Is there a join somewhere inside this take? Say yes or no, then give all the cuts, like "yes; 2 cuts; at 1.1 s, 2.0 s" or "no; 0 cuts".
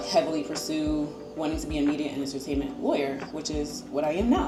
no; 0 cuts